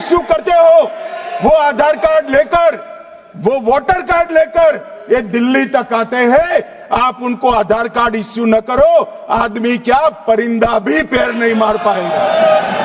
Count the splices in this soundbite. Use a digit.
0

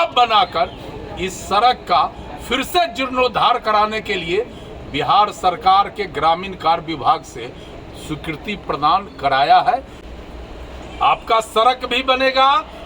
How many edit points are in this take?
1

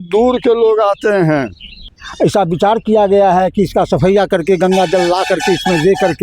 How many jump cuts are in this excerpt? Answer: 1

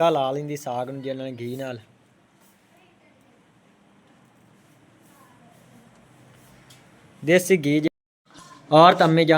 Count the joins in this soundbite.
1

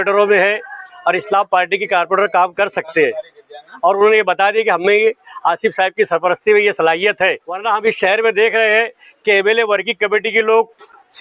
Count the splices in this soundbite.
1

